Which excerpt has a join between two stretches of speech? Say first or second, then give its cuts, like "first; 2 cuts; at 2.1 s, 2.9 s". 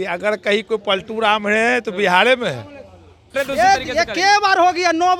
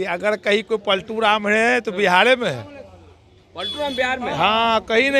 first; 1 cut; at 3.3 s